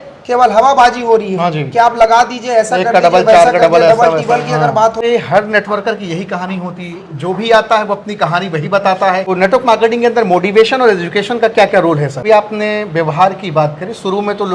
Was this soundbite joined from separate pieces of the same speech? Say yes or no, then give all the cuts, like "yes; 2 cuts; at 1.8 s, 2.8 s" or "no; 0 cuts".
yes; 3 cuts; at 5.0 s, 9.3 s, 12.2 s